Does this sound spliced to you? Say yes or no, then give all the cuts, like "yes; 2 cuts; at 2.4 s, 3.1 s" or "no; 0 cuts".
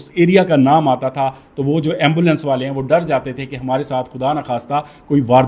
no; 0 cuts